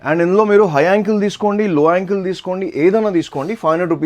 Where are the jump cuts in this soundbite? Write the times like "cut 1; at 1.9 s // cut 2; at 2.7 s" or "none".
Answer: none

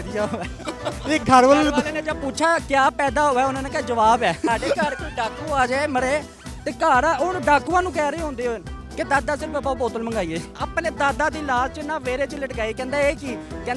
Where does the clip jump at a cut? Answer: cut 1; at 4.5 s // cut 2; at 10.5 s

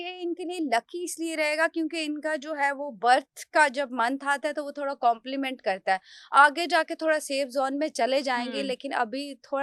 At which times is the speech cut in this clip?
none

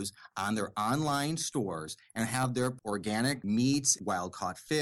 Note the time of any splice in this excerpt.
cut 1; at 2.8 s // cut 2; at 3.9 s

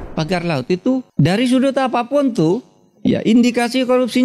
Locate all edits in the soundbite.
cut 1; at 1.1 s

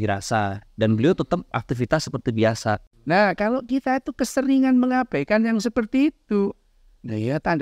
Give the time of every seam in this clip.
cut 1; at 2.9 s

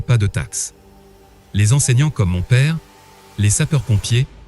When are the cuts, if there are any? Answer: cut 1; at 1.3 s

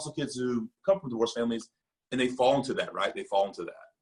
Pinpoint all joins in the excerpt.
none

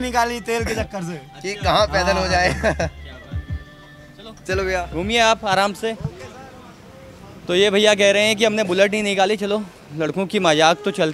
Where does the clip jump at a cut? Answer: none

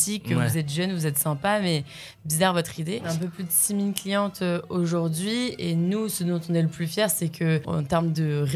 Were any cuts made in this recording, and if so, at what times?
cut 1; at 3.1 s // cut 2; at 7.6 s

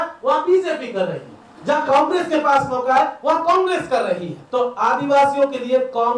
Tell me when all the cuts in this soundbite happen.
cut 1; at 4.4 s

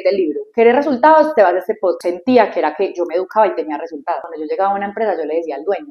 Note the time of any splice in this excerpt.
cut 1; at 2.0 s // cut 2; at 4.3 s

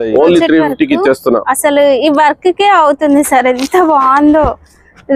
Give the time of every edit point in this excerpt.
none

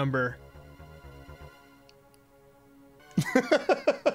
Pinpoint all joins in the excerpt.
cut 1; at 3.0 s

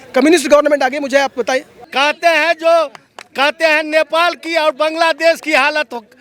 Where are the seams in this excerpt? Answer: cut 1; at 1.8 s

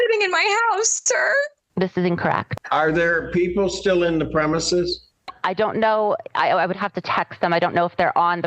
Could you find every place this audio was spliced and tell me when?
cut 1; at 2.5 s

